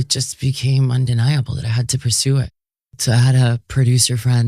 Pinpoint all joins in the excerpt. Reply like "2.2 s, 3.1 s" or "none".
2.9 s